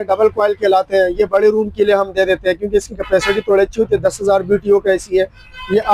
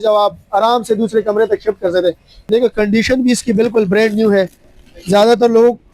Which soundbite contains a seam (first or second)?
second